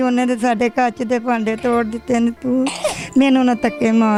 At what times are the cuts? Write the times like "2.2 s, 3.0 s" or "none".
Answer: none